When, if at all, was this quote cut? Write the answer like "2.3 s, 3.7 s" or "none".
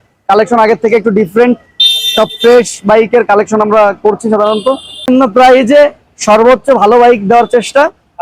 5.1 s